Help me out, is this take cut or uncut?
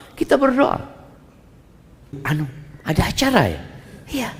cut